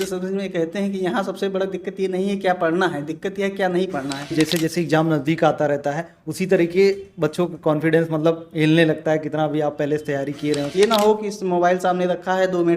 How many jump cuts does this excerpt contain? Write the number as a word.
two